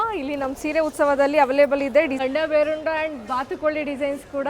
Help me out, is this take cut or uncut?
cut